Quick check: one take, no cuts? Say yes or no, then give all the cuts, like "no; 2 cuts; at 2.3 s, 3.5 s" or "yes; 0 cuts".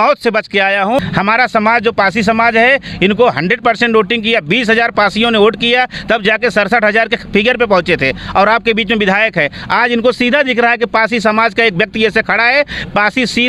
no; 1 cut; at 1.0 s